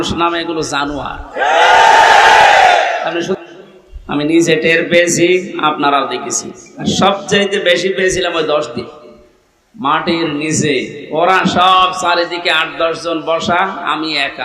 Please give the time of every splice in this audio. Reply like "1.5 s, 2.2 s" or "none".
3.4 s